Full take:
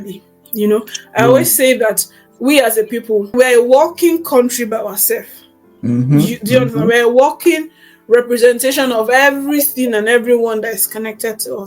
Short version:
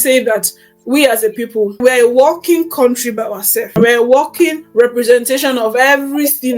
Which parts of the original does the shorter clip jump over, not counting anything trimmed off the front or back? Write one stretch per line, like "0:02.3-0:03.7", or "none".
0:05.2-0:06.8
0:07.7-0:08.0